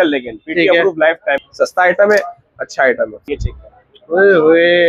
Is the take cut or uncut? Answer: cut